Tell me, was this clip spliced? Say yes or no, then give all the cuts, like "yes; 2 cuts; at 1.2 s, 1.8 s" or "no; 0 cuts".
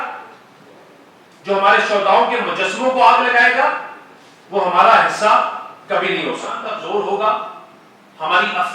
yes; 1 cut; at 6.7 s